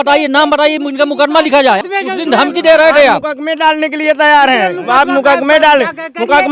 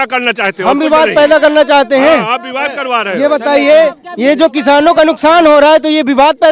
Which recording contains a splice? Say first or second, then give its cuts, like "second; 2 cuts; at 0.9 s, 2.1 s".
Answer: first; 1 cut; at 1.8 s